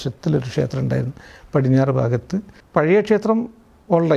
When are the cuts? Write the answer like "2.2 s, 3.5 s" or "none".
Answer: 2.6 s